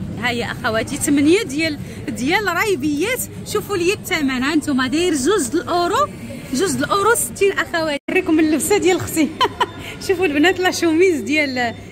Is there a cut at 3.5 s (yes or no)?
no